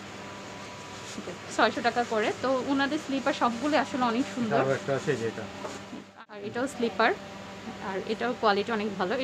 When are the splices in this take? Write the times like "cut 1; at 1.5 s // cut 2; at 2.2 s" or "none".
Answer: cut 1; at 6.1 s